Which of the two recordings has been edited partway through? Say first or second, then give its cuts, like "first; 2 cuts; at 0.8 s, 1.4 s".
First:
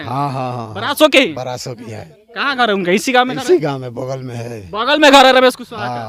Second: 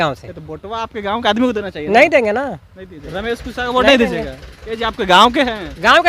second; 1 cut; at 3.0 s